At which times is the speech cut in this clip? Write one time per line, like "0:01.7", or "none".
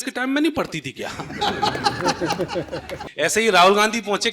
0:03.0